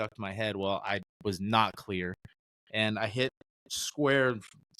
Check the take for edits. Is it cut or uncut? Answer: uncut